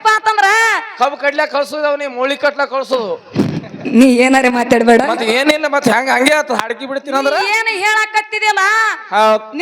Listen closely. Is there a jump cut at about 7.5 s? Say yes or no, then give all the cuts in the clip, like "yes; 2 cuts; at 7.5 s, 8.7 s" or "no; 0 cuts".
yes; 1 cut; at 7.5 s